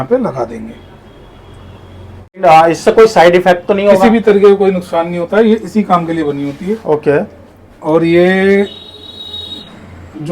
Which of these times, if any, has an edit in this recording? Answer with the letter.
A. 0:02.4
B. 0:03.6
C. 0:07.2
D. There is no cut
A